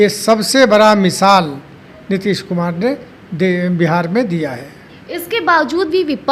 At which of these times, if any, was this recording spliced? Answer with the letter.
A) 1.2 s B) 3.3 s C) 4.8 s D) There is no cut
D